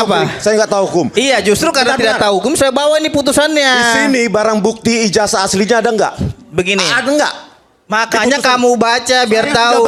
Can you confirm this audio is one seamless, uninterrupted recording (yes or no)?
yes